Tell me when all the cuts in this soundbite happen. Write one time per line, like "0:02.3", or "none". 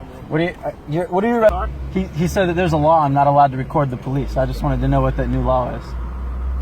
0:01.5